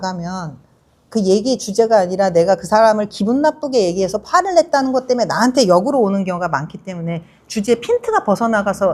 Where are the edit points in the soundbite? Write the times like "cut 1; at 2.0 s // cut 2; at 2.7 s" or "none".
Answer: none

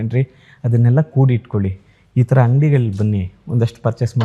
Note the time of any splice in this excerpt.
none

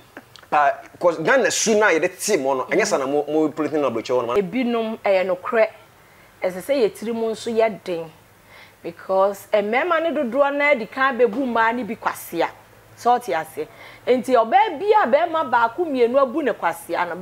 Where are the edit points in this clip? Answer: cut 1; at 4.3 s

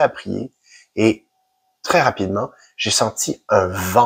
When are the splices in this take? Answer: none

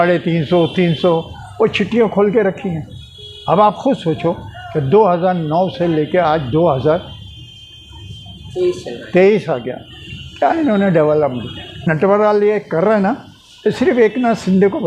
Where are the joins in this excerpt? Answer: cut 1; at 11.9 s

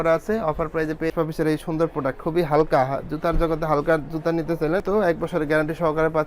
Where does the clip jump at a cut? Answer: cut 1; at 1.1 s // cut 2; at 4.8 s

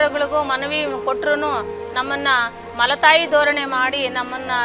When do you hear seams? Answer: none

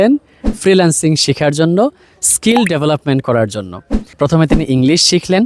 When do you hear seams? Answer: cut 1; at 4.0 s

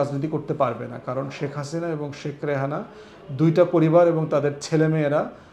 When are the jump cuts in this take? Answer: none

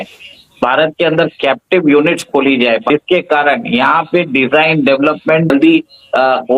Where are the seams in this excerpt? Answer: cut 1; at 2.8 s // cut 2; at 5.5 s

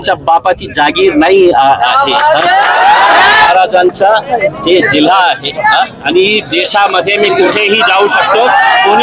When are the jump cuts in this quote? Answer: cut 1; at 3.5 s

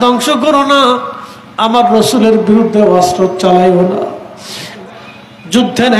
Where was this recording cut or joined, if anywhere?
cut 1; at 4.8 s

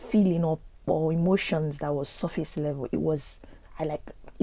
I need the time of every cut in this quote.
none

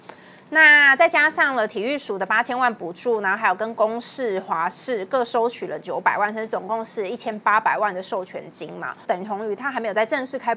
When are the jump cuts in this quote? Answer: cut 1; at 9.0 s

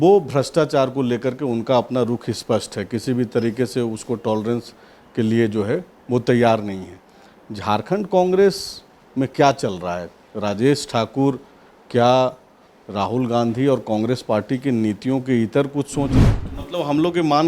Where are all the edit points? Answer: cut 1; at 16.2 s

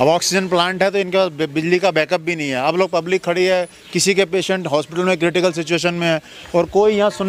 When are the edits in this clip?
none

